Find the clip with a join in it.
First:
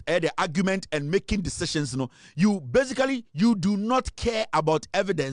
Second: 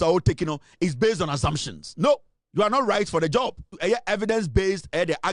second; 1 cut; at 3.7 s

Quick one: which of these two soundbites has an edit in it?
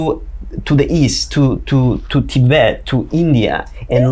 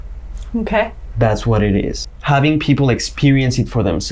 second; 1 cut; at 2.0 s

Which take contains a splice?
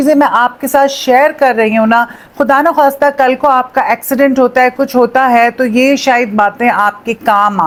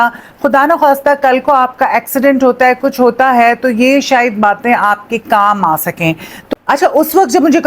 second; 1 cut; at 6.7 s

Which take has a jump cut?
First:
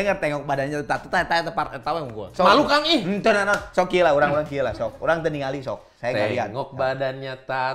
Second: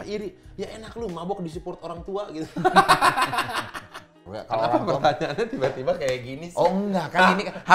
second; 1 cut; at 4.2 s

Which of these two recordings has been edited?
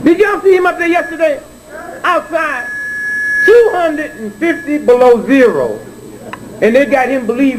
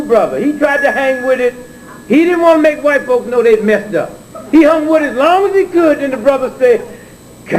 first; 1 cut; at 6.1 s

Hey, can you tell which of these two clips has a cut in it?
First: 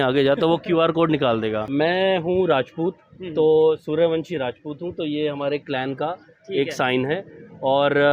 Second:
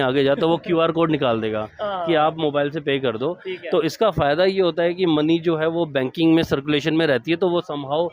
first; 1 cut; at 1.7 s

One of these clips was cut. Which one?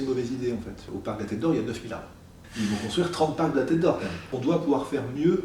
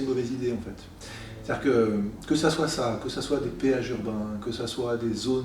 first; 3 cuts; at 0.9 s, 2.4 s, 4.3 s

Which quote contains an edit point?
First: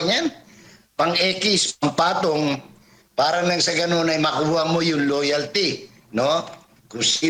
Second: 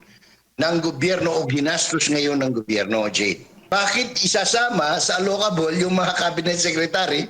second; 1 cut; at 3.5 s

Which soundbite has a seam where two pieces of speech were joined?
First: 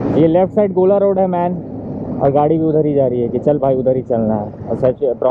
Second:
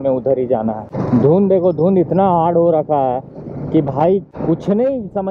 second; 2 cuts; at 0.9 s, 4.3 s

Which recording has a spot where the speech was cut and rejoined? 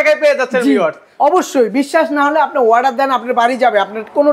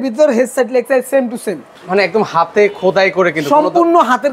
second; 1 cut; at 1.7 s

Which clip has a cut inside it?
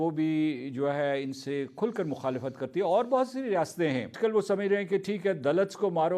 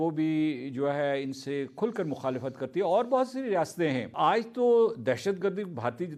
first; 1 cut; at 4.1 s

